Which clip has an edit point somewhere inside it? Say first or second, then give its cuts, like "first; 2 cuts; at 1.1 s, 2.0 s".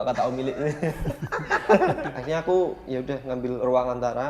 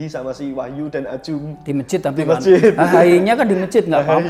first; 1 cut; at 2.1 s